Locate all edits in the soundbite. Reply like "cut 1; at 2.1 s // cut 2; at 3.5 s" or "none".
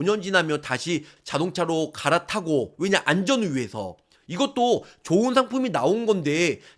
cut 1; at 1.2 s